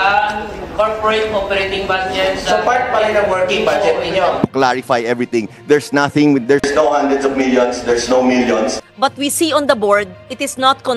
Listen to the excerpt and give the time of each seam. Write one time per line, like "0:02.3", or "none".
0:04.4
0:08.8

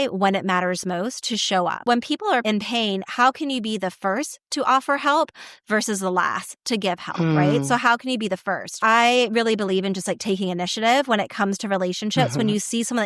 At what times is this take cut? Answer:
0:01.8

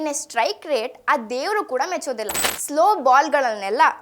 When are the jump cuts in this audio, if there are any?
0:02.5

